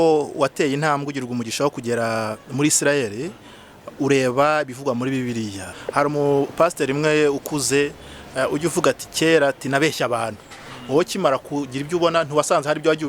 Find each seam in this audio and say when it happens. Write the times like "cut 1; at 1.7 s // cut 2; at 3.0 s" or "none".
cut 1; at 5.8 s